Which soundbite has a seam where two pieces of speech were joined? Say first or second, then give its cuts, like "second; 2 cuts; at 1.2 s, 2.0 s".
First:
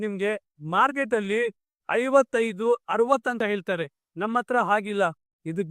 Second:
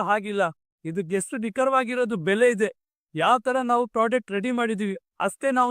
first; 1 cut; at 3.4 s